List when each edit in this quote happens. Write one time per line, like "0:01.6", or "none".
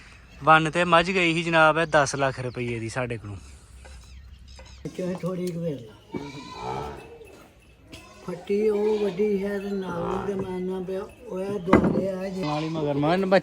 0:04.9
0:12.4